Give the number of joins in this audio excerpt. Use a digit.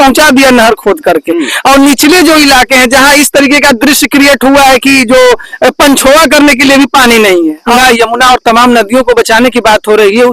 1